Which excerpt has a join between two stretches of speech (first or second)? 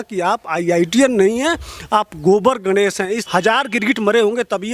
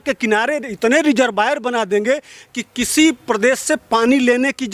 first